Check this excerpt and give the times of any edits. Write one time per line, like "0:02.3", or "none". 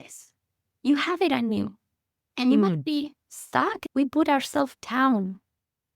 0:03.7

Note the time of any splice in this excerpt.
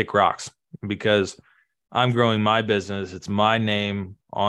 none

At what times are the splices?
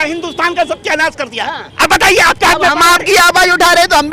none

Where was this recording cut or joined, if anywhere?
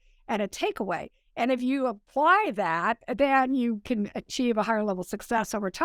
0:02.1

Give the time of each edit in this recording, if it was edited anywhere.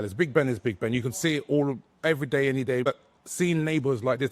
0:02.9

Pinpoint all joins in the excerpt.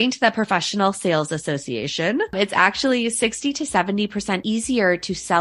0:02.3
0:04.4

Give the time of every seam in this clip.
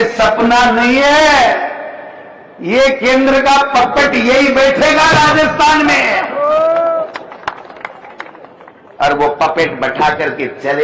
none

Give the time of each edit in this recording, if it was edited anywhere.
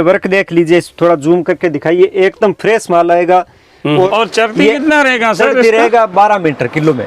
0:04.1

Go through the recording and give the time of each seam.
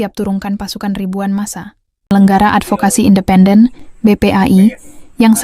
0:02.1

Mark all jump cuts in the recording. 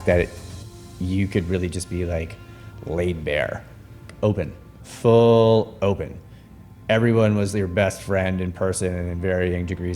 0:04.1

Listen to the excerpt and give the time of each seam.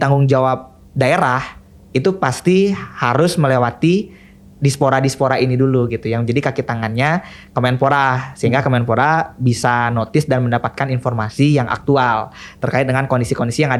none

